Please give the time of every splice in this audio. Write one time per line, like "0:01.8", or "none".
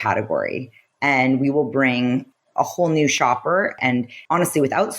0:03.8